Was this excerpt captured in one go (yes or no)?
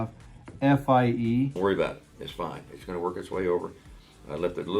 no